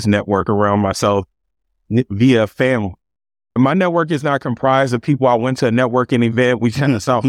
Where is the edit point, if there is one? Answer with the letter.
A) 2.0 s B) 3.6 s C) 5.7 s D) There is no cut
B